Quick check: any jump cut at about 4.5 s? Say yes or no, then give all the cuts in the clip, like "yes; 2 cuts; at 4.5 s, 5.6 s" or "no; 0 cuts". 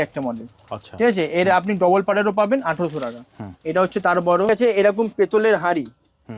yes; 1 cut; at 4.5 s